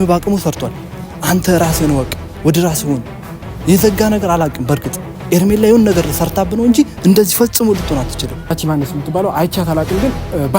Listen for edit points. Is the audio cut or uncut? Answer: cut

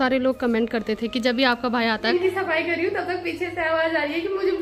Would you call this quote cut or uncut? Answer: cut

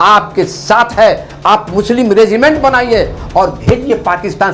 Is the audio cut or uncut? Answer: uncut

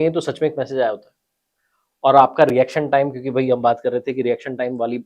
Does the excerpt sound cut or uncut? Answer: uncut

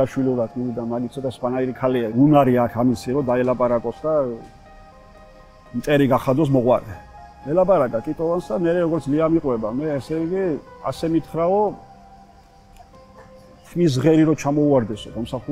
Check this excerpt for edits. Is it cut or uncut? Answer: cut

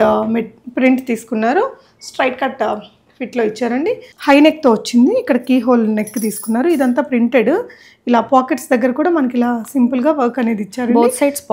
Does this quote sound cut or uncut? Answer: cut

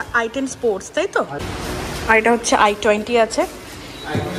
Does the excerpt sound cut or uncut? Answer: cut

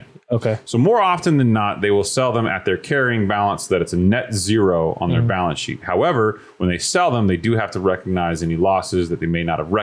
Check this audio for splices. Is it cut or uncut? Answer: uncut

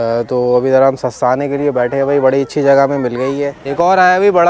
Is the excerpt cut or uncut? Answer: cut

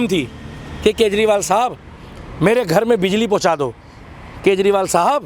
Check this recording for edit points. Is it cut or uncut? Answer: uncut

